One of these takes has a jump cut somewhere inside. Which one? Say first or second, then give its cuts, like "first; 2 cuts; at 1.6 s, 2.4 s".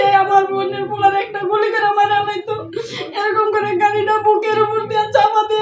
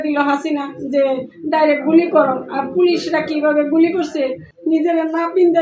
second; 1 cut; at 4.5 s